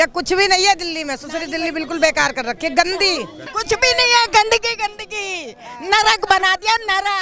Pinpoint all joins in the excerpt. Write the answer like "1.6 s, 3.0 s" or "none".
3.5 s